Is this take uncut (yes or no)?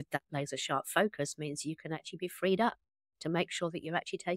yes